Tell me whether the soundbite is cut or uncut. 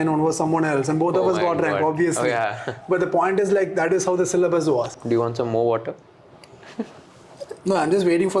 cut